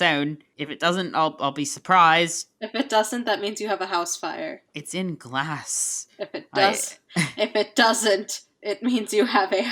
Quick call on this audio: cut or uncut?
uncut